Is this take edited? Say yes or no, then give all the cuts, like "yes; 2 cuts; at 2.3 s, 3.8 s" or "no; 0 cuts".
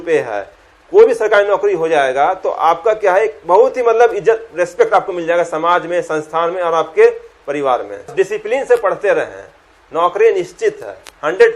yes; 1 cut; at 8.1 s